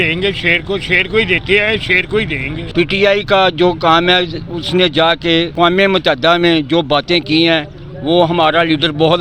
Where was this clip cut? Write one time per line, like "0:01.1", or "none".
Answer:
0:02.5